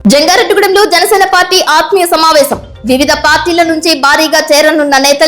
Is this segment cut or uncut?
uncut